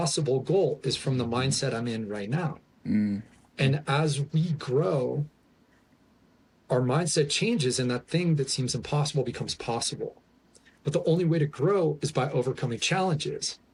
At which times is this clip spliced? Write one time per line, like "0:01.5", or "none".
none

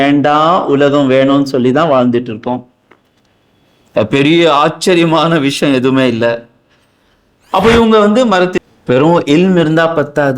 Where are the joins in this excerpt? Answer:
0:08.6

